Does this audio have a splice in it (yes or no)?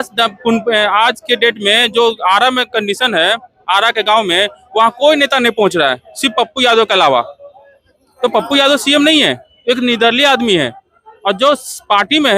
no